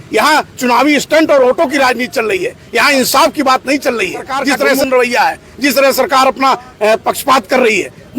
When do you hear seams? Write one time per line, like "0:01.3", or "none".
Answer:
0:04.8